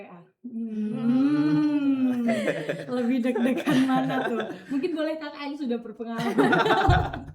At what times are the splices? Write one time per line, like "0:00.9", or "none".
none